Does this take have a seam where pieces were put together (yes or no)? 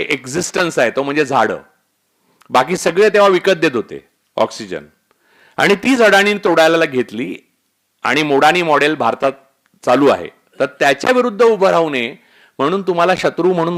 no